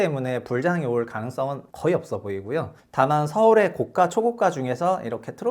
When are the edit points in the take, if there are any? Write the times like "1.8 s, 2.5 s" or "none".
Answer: 1.7 s, 2.8 s